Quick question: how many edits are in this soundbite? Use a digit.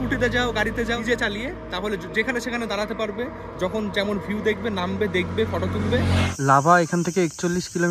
2